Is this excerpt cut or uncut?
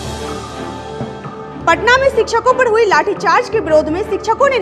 cut